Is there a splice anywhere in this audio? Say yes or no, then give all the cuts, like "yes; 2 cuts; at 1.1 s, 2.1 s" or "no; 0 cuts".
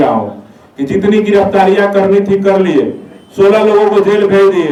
no; 0 cuts